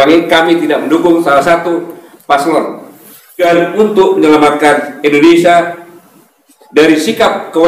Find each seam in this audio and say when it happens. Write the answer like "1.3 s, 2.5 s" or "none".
3.4 s